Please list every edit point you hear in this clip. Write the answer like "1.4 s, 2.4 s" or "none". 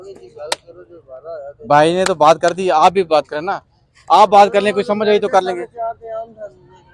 none